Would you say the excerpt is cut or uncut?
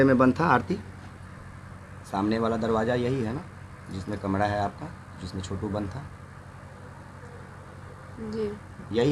uncut